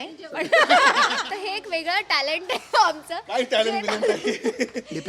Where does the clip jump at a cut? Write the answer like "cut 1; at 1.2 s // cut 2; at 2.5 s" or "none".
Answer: cut 1; at 1.2 s